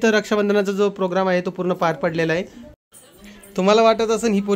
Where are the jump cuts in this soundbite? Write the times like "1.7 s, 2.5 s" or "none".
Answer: 2.6 s